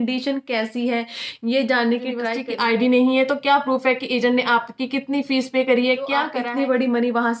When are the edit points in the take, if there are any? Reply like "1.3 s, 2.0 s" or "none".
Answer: 2.4 s, 6.3 s